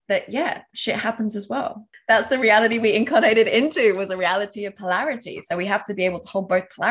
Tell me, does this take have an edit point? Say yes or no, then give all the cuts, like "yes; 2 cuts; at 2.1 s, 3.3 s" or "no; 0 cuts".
yes; 1 cut; at 1.9 s